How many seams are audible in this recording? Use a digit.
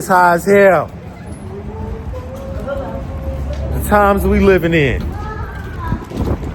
0